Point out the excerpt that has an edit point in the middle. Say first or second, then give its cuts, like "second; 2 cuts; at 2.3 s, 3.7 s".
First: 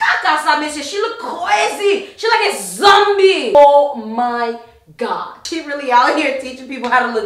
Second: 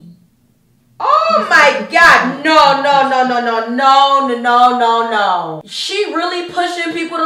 first; 2 cuts; at 3.5 s, 5.5 s